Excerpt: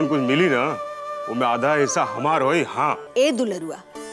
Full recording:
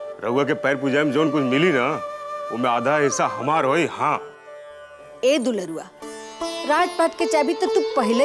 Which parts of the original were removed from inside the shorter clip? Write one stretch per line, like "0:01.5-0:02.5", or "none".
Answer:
0:04.3-0:05.1